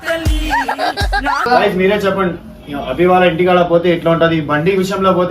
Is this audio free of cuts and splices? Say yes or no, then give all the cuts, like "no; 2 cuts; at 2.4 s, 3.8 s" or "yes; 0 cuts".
no; 1 cut; at 1.5 s